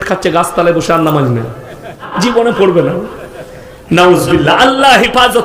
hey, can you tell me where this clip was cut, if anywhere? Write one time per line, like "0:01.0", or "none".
0:02.1